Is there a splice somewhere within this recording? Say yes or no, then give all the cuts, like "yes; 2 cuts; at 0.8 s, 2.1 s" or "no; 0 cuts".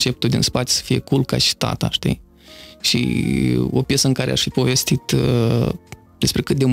no; 0 cuts